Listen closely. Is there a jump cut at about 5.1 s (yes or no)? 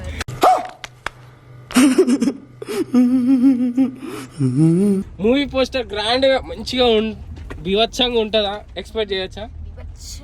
yes